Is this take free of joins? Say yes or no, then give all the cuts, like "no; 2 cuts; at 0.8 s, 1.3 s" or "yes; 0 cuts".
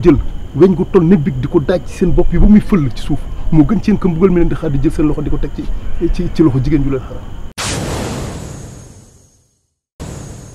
no; 1 cut; at 7.4 s